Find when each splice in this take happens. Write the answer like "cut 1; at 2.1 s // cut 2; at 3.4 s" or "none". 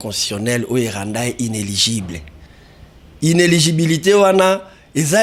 none